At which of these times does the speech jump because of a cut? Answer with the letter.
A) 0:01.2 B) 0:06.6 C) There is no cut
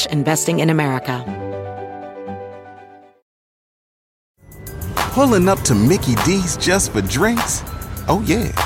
A